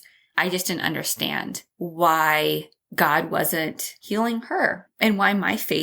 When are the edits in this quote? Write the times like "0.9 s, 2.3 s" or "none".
1.6 s, 2.8 s, 4.0 s, 4.9 s